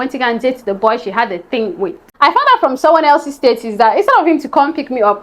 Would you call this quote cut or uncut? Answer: cut